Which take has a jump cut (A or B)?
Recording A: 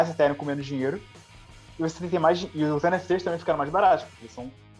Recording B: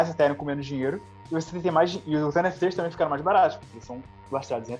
B